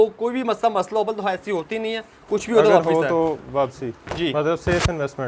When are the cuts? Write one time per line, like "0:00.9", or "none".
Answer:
none